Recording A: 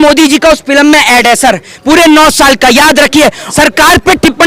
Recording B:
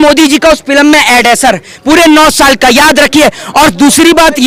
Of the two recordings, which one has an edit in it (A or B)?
A